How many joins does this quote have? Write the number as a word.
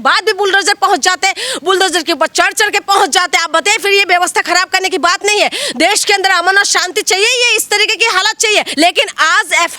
one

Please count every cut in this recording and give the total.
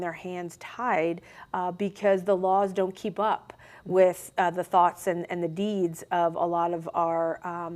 zero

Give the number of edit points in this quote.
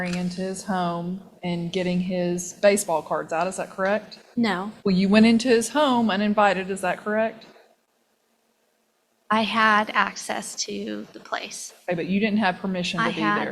one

